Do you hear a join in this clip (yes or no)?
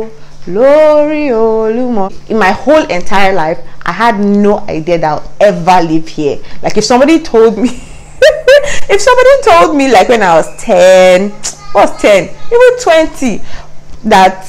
yes